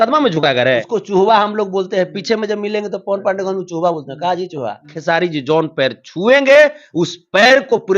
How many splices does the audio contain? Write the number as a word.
two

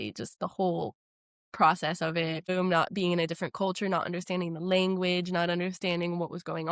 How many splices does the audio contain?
one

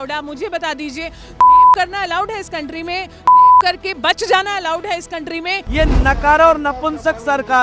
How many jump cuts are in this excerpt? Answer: one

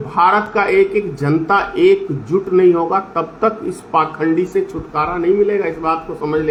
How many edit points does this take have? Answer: zero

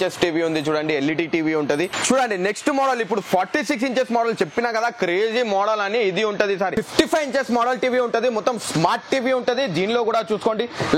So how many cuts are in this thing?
two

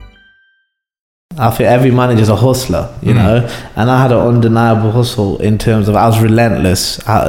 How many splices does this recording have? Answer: one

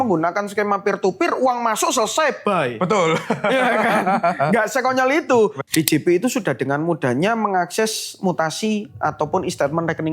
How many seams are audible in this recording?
one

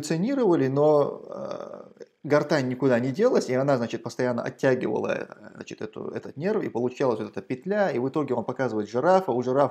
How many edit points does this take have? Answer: zero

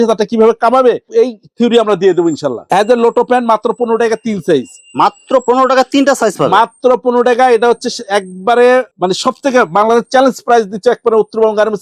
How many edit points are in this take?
zero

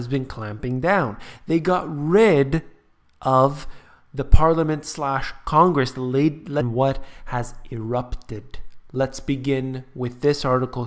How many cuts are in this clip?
zero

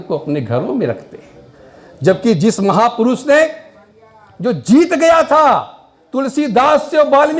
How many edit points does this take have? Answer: zero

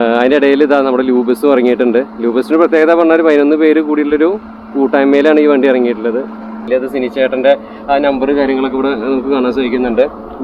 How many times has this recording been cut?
one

